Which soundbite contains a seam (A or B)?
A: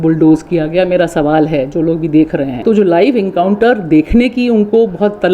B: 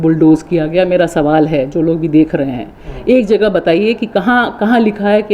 A